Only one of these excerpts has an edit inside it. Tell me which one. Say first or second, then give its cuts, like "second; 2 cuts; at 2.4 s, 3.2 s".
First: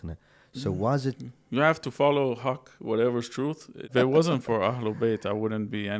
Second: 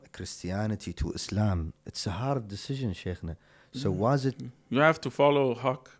first; 1 cut; at 3.9 s